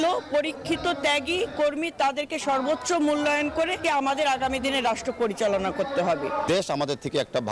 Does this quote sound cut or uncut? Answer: cut